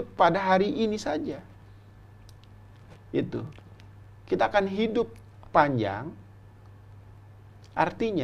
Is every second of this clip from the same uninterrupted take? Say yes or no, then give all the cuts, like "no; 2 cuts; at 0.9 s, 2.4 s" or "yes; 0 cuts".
yes; 0 cuts